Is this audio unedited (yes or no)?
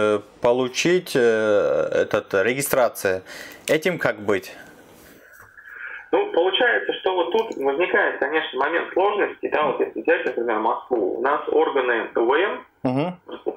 yes